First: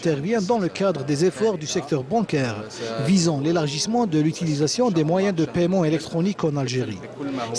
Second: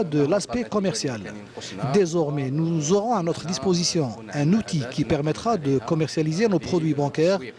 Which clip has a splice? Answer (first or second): second